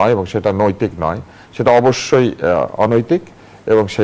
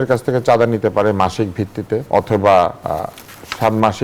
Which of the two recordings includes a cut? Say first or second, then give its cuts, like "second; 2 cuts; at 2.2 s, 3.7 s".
second; 2 cuts; at 2.0 s, 2.8 s